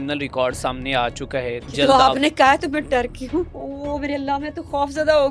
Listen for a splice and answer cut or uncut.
cut